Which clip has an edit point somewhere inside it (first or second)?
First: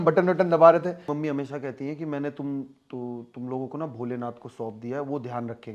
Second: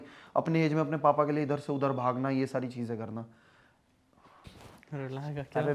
first